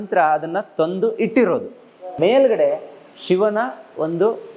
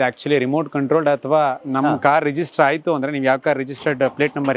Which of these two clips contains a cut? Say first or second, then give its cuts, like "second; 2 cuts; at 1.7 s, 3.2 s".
first; 1 cut; at 2.0 s